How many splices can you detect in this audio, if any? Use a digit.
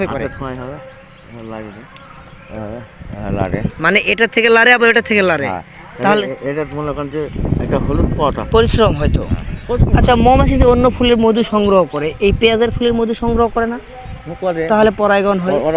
1